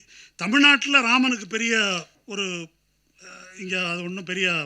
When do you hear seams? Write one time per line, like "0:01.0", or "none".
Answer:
0:02.2